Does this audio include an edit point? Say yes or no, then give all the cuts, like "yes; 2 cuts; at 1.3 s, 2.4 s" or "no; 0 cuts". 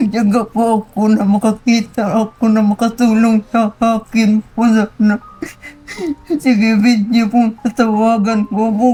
no; 0 cuts